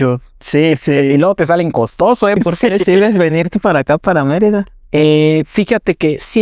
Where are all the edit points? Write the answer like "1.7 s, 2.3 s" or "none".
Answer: 2.4 s

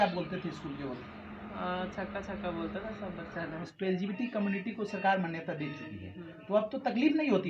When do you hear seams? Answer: 3.7 s

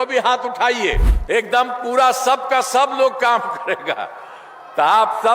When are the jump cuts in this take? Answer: 1.1 s

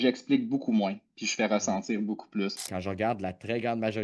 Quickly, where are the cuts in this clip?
2.7 s

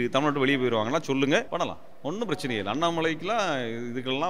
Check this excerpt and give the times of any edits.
1.5 s

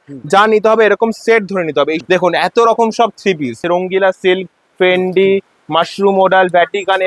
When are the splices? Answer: 2.0 s, 3.6 s

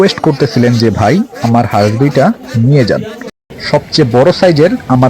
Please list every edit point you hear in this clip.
3.6 s

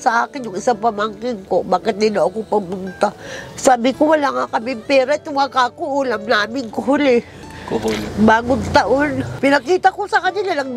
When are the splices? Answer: 9.2 s

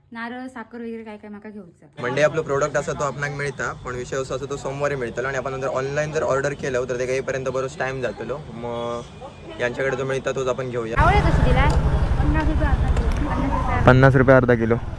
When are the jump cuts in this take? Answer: 1.9 s, 10.9 s

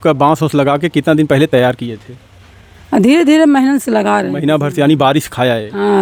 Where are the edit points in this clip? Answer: none

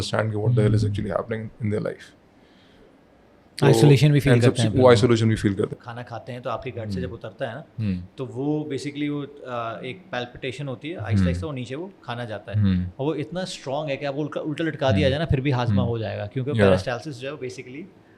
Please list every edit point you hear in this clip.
5.7 s

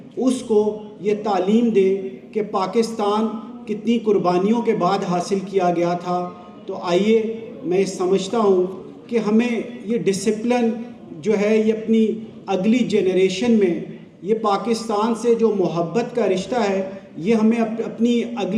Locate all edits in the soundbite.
none

